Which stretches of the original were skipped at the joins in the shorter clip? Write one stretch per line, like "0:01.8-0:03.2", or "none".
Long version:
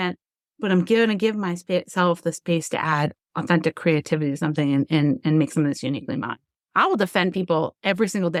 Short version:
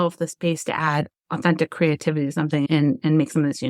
0:04.7-0:04.9